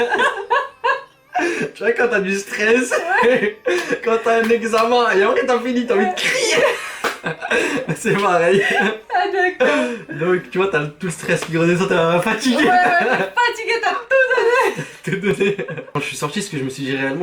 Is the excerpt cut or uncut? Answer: uncut